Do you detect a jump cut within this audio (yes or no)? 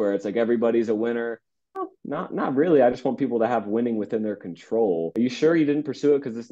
yes